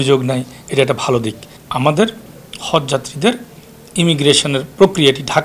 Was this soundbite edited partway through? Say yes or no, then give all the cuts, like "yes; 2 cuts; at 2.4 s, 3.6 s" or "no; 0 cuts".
yes; 1 cut; at 1.5 s